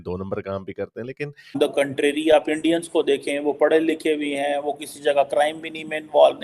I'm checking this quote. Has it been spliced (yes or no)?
yes